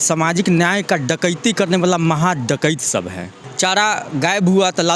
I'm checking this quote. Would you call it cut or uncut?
cut